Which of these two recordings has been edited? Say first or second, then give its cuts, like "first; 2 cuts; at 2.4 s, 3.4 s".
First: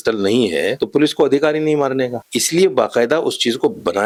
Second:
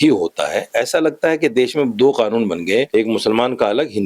second; 1 cut; at 2.9 s